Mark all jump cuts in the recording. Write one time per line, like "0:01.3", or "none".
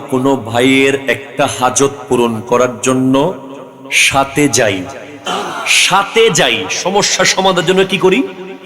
0:05.2